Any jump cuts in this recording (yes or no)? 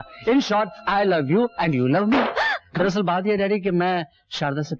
yes